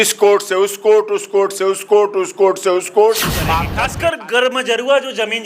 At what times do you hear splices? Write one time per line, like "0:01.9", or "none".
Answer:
0:03.5